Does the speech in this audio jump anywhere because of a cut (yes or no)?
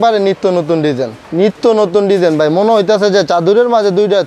yes